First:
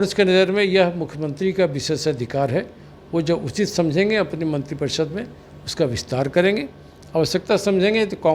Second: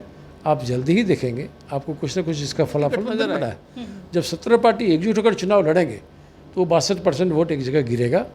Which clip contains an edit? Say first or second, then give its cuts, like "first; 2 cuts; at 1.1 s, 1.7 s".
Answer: second; 1 cut; at 3.3 s